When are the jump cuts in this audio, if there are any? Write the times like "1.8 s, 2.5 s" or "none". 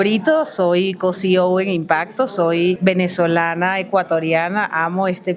2.8 s